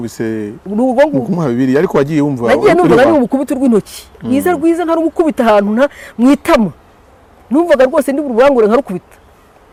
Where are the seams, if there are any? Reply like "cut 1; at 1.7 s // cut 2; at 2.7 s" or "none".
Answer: none

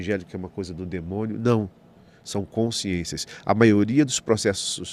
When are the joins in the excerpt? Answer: none

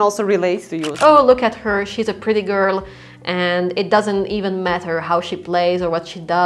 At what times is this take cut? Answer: cut 1; at 0.9 s

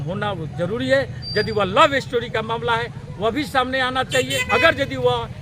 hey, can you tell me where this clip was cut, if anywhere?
cut 1; at 4.4 s

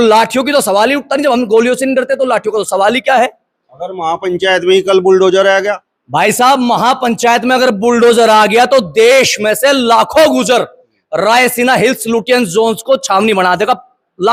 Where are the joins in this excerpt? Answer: none

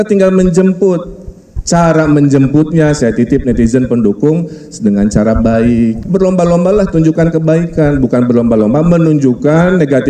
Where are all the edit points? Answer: cut 1; at 6.0 s

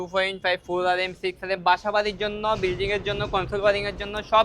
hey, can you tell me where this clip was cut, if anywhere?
none

